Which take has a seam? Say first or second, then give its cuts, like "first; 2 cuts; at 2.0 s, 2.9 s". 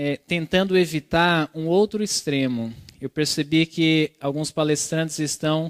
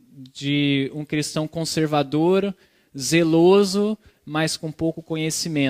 first; 1 cut; at 4.2 s